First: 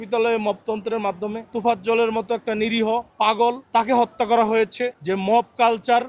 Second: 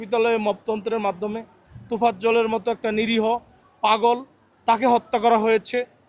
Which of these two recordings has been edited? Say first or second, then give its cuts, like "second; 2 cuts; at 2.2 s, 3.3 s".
first; 3 cuts; at 1.4 s, 3.3 s, 5.0 s